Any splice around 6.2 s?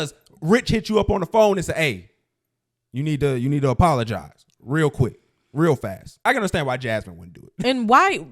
yes; 1 cut; at 6.2 s

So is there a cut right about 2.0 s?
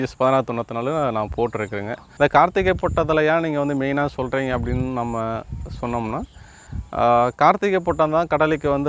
yes; 1 cut; at 2.0 s

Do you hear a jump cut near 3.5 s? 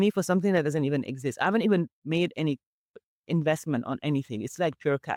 no; 0 cuts

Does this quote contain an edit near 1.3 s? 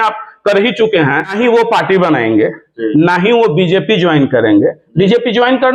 yes; 1 cut; at 1.3 s

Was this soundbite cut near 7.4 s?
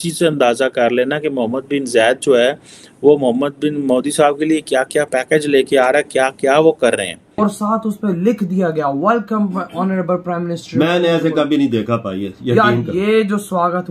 yes; 1 cut; at 7.4 s

